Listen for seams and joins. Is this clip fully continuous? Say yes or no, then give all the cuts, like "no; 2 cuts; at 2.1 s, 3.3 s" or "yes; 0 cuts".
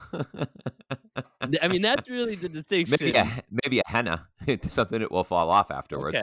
yes; 0 cuts